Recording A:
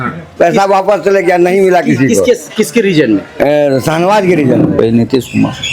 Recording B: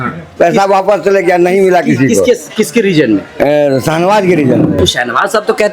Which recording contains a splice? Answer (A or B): A